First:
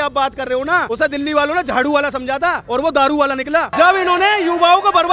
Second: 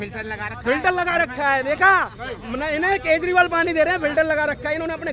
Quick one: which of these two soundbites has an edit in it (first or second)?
first